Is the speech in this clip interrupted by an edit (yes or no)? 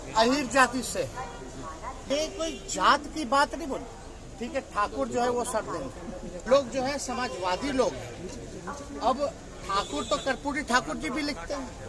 yes